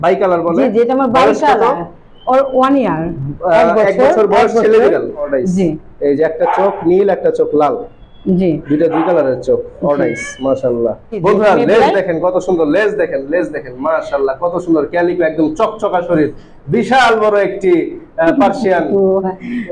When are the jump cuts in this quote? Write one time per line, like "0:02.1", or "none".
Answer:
0:05.3
0:11.2